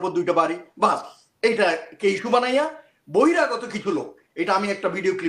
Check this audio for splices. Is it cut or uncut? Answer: uncut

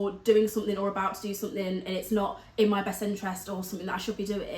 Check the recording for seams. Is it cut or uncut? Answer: uncut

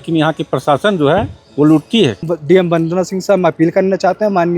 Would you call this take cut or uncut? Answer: cut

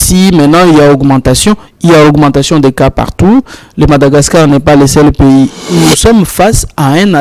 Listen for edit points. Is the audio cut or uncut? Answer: cut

